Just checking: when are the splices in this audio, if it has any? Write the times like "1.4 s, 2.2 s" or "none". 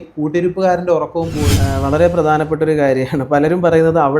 1.6 s